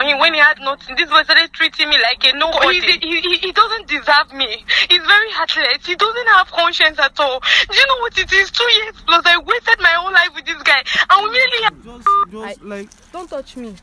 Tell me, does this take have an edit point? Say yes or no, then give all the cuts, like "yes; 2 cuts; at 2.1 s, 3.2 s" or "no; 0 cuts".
yes; 2 cuts; at 2.5 s, 12.3 s